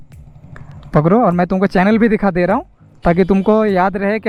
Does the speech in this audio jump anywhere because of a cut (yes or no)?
no